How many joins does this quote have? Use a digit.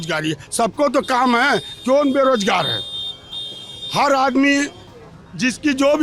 0